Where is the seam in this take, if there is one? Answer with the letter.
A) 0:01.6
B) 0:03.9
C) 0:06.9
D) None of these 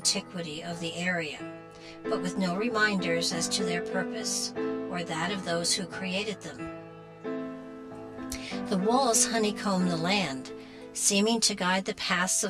C